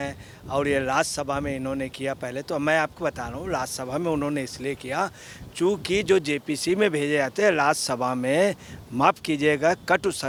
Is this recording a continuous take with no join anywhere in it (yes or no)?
yes